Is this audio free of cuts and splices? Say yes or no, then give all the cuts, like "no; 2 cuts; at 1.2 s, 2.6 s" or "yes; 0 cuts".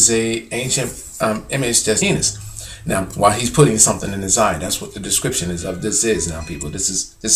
yes; 0 cuts